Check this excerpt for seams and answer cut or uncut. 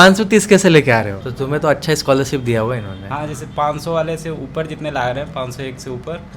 cut